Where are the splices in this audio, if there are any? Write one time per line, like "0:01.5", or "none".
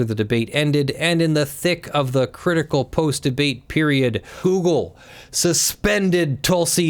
0:04.3